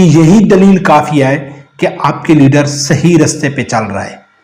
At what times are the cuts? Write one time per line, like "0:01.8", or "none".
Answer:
none